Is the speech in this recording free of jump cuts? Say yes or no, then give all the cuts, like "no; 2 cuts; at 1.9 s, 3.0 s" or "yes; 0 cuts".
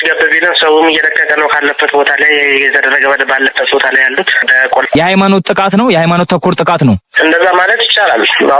no; 1 cut; at 4.9 s